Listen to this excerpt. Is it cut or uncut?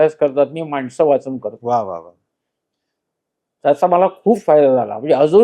uncut